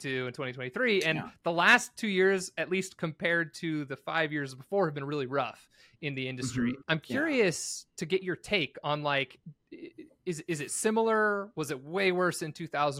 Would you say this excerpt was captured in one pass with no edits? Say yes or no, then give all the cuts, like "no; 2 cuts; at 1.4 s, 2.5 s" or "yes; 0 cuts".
no; 1 cut; at 6.8 s